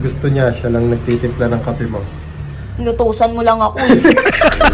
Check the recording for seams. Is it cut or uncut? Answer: uncut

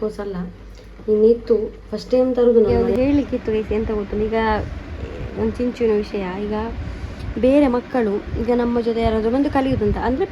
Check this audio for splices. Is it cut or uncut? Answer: cut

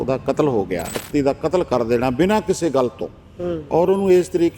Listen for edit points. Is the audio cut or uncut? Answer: cut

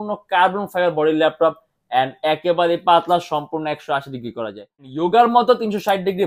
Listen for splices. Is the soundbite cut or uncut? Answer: cut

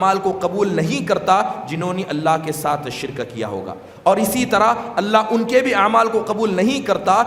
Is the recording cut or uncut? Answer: uncut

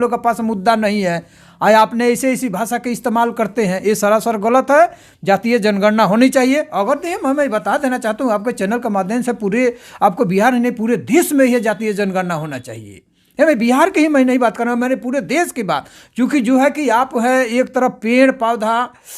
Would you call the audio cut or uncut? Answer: uncut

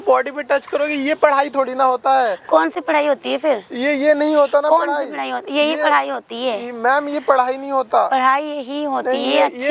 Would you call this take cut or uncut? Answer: uncut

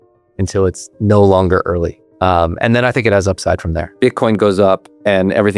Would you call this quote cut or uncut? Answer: cut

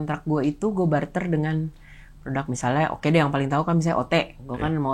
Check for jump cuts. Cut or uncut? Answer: uncut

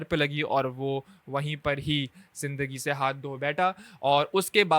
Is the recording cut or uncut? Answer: uncut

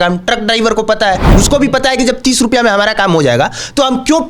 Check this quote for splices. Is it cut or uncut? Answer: cut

